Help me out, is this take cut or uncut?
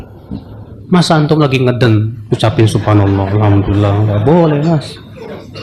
uncut